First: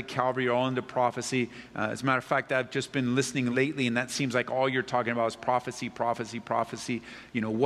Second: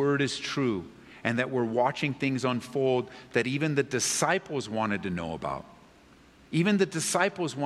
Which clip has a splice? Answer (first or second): first